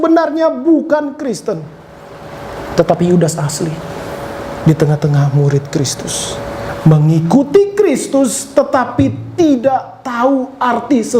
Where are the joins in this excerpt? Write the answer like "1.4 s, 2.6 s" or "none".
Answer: 6.7 s